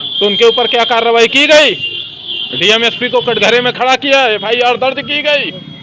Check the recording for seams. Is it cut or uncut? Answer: uncut